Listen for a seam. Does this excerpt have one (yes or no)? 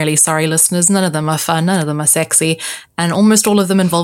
no